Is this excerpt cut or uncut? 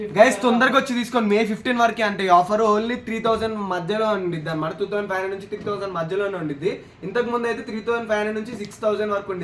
uncut